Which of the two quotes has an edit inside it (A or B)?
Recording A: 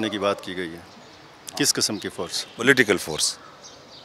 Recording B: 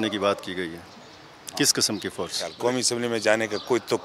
B